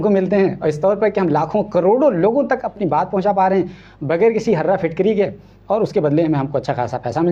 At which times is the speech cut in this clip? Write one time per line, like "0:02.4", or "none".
none